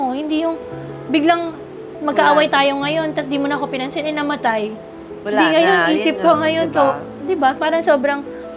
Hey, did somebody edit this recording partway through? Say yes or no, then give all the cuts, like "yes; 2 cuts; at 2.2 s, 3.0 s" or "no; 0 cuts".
no; 0 cuts